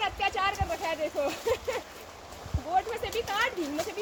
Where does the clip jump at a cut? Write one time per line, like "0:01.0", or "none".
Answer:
none